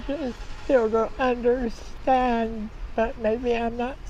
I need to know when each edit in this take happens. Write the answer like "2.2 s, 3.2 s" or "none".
none